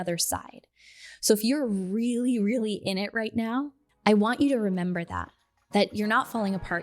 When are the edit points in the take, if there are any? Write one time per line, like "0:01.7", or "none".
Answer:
0:03.8